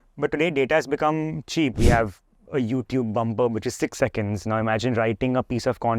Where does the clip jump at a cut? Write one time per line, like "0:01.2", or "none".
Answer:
0:01.8